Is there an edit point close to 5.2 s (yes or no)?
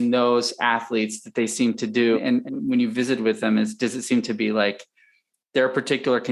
no